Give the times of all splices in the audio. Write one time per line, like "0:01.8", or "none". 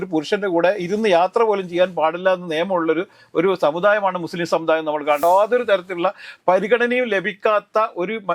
0:05.2